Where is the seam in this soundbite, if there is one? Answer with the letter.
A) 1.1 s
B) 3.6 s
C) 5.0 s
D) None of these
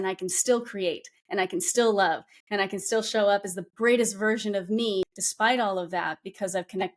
C